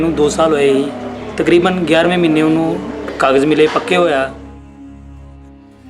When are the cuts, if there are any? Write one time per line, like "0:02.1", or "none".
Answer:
0:04.0